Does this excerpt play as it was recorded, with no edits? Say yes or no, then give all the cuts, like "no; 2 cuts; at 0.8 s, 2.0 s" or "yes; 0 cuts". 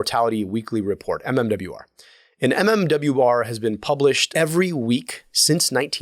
no; 1 cut; at 4.3 s